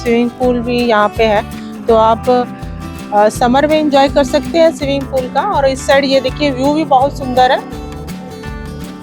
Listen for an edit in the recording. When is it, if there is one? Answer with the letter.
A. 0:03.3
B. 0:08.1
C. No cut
B